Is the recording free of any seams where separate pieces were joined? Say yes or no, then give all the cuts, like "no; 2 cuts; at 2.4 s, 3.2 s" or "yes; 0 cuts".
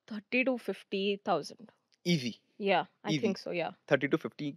yes; 0 cuts